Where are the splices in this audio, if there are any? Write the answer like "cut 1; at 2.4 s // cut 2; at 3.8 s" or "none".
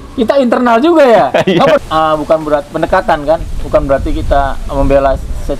cut 1; at 1.8 s